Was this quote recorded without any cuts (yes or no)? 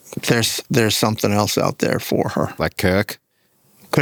yes